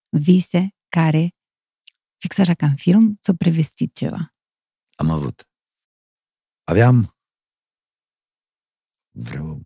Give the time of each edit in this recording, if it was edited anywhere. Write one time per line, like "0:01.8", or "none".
none